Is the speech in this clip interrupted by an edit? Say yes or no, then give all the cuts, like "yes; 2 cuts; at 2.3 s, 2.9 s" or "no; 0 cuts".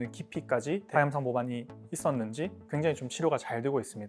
no; 0 cuts